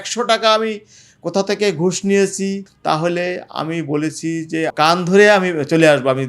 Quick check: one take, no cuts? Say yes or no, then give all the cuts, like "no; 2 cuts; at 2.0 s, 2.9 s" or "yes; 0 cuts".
no; 2 cuts; at 2.7 s, 4.7 s